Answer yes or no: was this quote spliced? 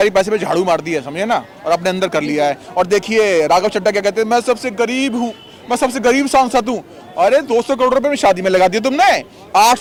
no